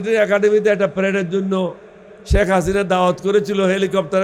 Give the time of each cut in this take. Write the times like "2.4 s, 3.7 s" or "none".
none